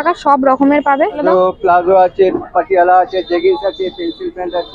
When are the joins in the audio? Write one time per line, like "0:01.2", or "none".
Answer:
0:01.2